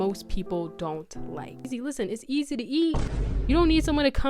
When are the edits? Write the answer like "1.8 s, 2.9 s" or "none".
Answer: 1.6 s